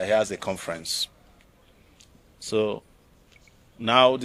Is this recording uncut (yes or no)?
yes